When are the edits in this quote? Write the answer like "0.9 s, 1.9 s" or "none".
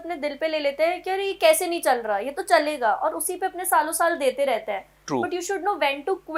none